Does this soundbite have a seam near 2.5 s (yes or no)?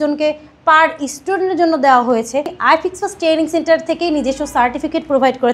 yes